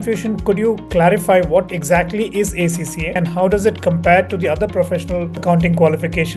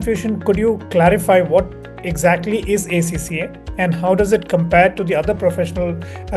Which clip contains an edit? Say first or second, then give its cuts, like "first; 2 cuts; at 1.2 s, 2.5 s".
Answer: first; 3 cuts; at 1.8 s, 3.0 s, 5.3 s